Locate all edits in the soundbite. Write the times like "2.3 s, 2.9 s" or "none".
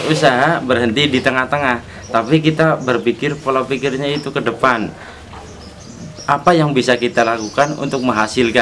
none

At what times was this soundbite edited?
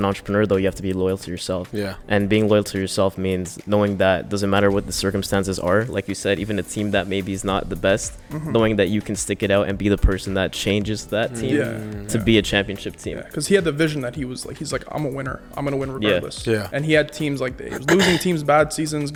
none

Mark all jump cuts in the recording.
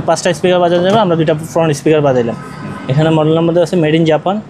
none

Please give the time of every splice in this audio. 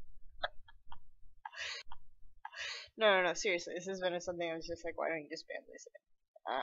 5.4 s

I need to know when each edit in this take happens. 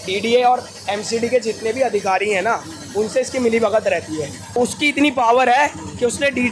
4.4 s

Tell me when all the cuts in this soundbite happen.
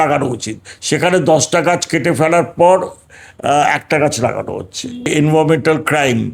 5.1 s

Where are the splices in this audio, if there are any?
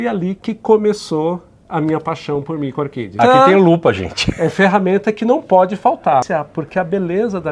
3.1 s, 6.3 s

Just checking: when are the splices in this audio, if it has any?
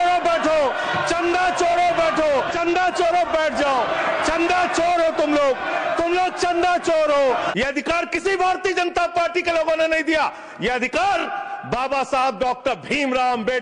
2.5 s, 7.5 s

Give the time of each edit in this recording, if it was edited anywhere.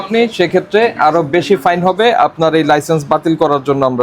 none

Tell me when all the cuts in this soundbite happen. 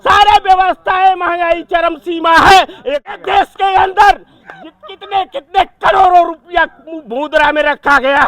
3.1 s

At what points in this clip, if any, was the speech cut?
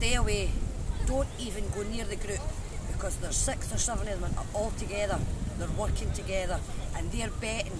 none

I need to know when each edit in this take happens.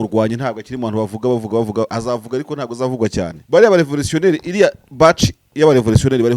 3.4 s

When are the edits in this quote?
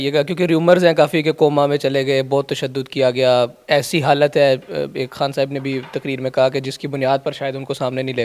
none

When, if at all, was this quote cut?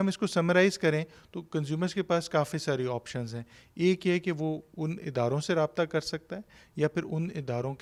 none

